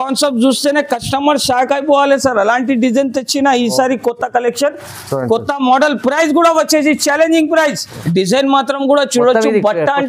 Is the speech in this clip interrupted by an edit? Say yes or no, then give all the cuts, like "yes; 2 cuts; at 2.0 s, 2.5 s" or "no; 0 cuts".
yes; 1 cut; at 7.9 s